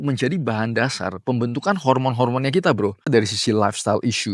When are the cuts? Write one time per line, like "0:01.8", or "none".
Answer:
0:03.1